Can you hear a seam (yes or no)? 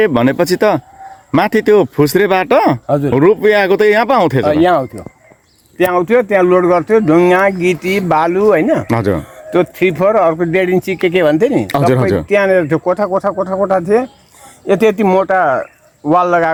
no